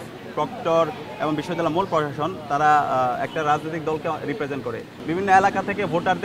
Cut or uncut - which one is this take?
cut